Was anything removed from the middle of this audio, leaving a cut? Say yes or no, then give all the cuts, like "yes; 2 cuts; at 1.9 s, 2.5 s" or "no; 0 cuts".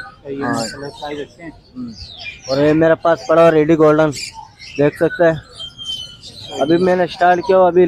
no; 0 cuts